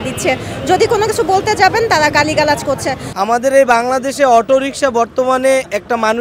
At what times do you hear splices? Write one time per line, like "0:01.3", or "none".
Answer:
0:03.1